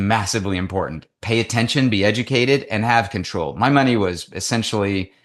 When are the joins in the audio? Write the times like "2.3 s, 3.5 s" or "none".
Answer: none